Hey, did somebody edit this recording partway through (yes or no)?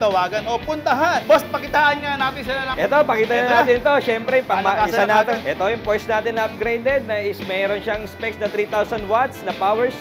yes